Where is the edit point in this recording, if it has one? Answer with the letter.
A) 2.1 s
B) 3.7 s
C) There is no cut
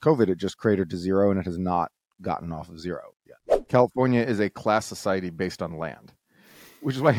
B